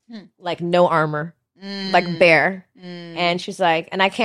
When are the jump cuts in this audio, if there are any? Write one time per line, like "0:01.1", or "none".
none